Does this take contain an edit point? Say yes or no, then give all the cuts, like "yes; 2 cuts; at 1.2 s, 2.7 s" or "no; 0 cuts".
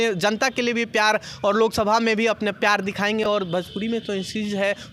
no; 0 cuts